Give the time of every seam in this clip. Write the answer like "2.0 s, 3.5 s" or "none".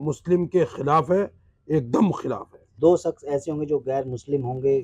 2.7 s